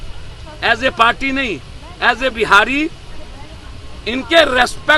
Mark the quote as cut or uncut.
uncut